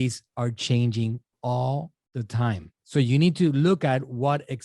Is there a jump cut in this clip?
yes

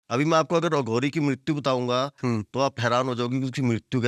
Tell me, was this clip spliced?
no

